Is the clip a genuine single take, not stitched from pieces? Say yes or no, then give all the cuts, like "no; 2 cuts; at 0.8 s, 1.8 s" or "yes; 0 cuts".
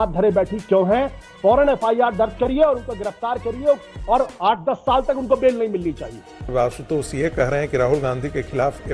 no; 1 cut; at 6.4 s